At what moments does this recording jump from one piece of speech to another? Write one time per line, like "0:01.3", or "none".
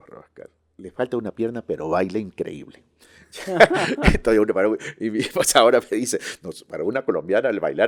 none